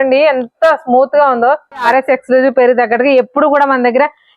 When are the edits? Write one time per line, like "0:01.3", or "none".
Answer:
0:01.9